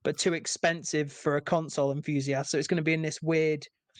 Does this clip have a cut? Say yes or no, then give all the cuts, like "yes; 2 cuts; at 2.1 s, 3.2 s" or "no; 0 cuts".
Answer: no; 0 cuts